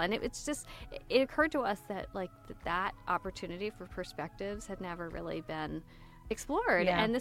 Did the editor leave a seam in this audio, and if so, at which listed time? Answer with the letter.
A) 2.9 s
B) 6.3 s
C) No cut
B